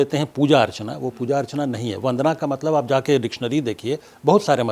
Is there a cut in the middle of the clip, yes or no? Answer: no